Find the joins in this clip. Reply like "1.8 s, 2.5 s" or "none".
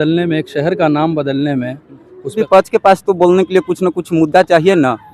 2.3 s